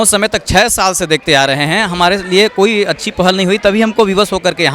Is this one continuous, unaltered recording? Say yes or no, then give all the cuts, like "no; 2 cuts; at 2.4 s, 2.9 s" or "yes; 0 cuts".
yes; 0 cuts